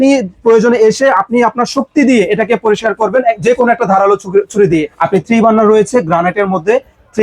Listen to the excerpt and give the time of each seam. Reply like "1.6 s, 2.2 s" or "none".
4.9 s

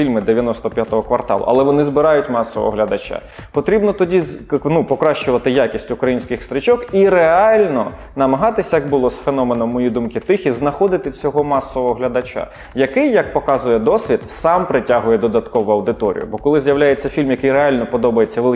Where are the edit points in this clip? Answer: none

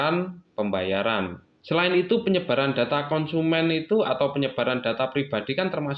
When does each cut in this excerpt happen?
1.6 s

